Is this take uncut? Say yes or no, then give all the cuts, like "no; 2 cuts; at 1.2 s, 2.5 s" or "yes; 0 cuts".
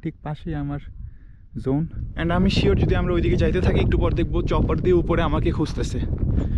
no; 1 cut; at 2.0 s